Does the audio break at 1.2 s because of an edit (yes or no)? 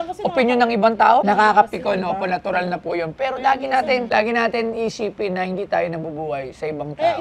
yes